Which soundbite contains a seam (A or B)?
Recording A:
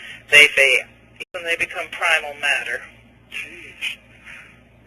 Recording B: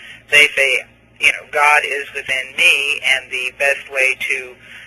B